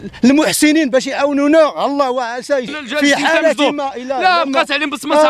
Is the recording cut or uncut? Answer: cut